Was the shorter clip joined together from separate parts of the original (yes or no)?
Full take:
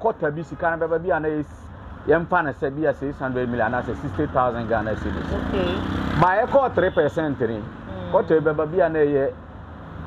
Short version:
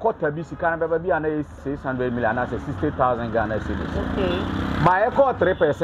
yes